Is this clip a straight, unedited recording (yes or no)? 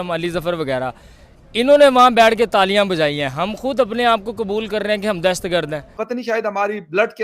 no